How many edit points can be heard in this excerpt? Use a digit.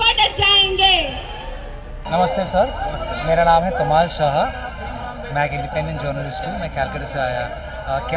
0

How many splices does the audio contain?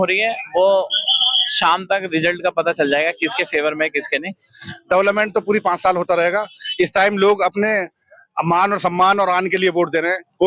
1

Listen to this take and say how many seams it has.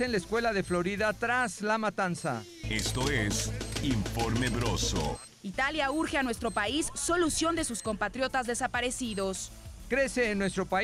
3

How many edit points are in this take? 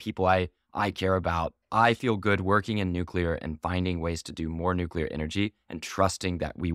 1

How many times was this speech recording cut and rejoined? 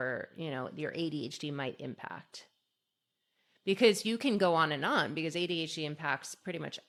0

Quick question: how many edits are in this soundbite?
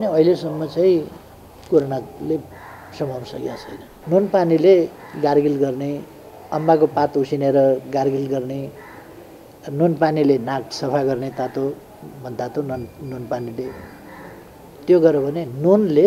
1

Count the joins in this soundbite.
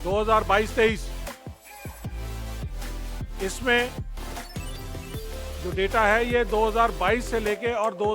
2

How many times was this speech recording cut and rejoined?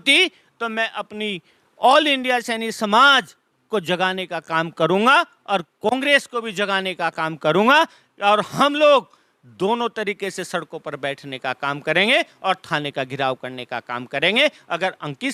0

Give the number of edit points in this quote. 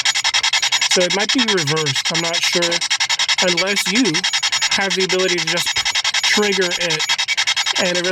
0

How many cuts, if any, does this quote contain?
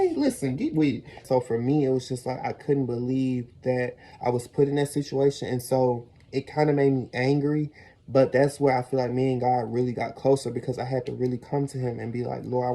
1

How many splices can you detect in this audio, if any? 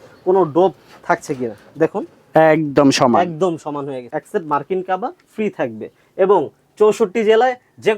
1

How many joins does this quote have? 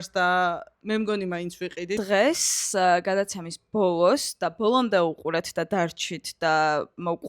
1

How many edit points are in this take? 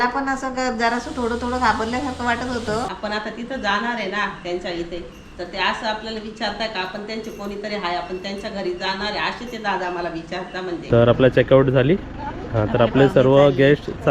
2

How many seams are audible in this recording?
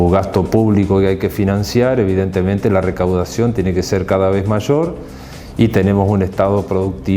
0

